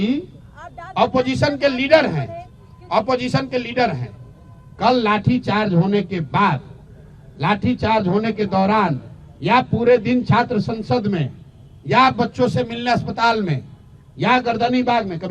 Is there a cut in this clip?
no; 0 cuts

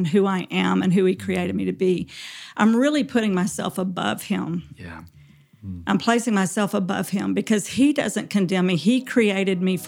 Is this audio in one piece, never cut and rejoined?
yes; 0 cuts

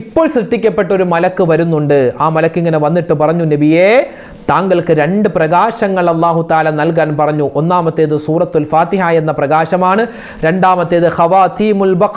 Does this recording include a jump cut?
no; 0 cuts

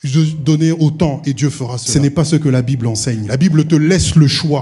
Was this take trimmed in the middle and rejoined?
yes; 2 cuts; at 1.8 s, 3.2 s

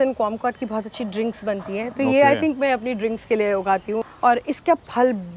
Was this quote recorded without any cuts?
no; 1 cut; at 4.1 s

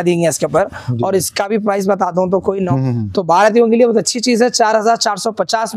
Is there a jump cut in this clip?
yes; 1 cut; at 2.7 s

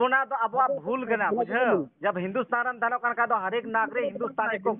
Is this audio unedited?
yes; 0 cuts

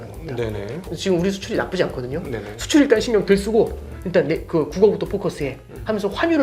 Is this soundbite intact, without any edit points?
no; 1 cut; at 0.9 s

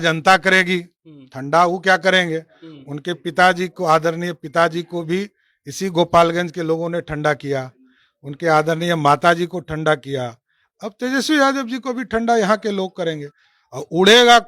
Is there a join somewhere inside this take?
no; 0 cuts

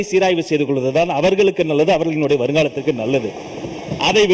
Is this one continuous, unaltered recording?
yes; 0 cuts

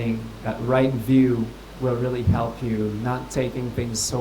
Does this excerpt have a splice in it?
yes; 1 cut; at 1.6 s

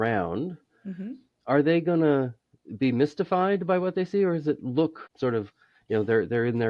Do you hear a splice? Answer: no; 0 cuts

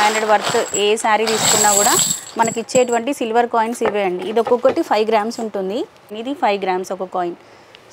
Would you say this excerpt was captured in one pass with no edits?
no; 1 cut; at 6.1 s

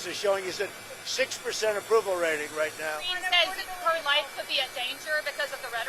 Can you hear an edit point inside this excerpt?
yes; 1 cut; at 3.1 s

